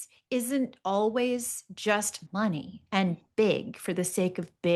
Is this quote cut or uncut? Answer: cut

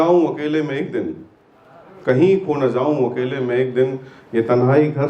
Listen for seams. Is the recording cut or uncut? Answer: uncut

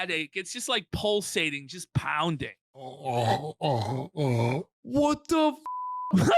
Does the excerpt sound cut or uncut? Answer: cut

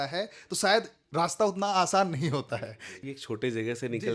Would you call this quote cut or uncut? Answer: cut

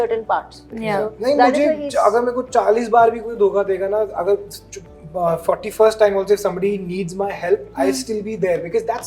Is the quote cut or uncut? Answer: uncut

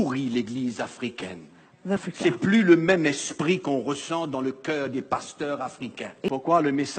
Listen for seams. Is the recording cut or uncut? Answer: cut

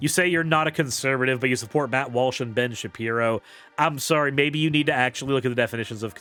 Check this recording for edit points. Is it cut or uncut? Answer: uncut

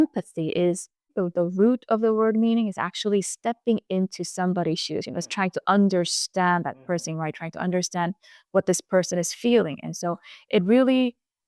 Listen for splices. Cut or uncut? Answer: cut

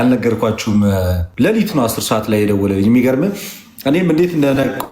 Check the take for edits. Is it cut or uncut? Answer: cut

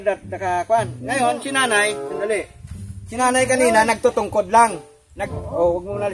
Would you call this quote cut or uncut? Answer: uncut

